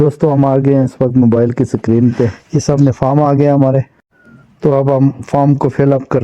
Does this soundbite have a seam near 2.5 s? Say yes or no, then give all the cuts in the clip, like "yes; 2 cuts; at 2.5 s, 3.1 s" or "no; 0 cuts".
yes; 1 cut; at 2.5 s